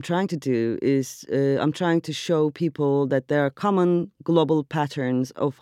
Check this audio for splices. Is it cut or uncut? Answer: uncut